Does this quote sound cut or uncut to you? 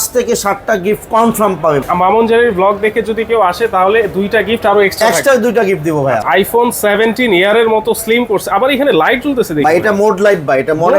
cut